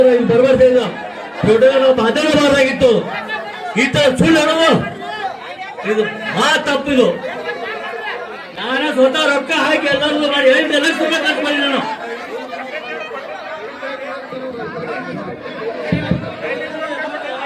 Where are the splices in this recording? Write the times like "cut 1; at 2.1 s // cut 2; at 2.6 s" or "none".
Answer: none